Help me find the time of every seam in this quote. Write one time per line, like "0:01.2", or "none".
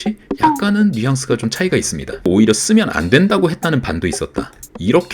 0:02.3